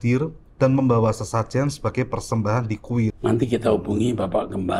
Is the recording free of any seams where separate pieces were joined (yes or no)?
no